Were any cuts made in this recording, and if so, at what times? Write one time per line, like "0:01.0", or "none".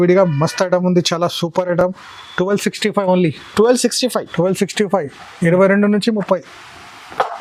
none